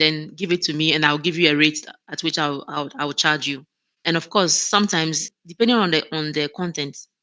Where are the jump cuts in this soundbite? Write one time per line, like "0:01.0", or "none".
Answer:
0:04.0
0:05.3

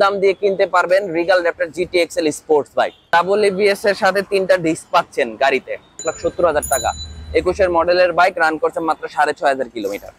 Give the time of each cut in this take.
0:03.0
0:06.1

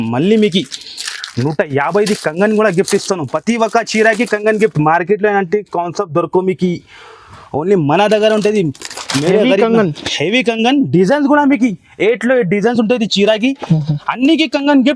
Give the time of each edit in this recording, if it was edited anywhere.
none

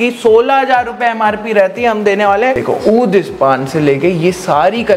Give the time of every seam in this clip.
0:02.6

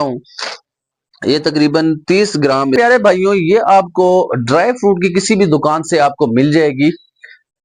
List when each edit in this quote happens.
0:02.8

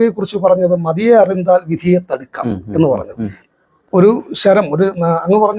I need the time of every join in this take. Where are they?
0:03.4

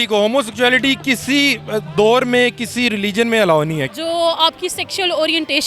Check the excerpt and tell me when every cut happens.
0:03.9

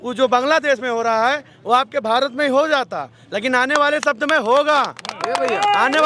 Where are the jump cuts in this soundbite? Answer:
none

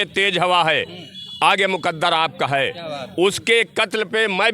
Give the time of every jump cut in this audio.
none

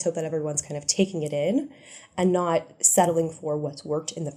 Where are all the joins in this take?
none

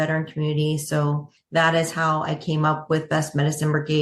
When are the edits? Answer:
0:01.3

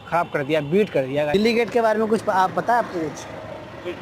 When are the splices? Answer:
0:01.3

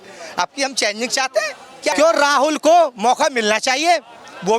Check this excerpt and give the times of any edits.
0:01.9

